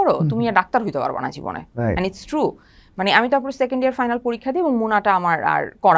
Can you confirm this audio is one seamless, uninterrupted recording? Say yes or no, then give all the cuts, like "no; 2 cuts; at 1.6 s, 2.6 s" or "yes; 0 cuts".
yes; 0 cuts